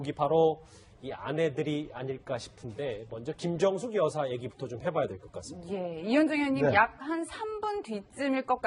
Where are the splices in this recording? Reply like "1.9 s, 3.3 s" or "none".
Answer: none